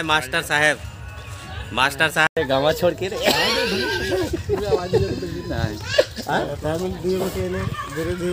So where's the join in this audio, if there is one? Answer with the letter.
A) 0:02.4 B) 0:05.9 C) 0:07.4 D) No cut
A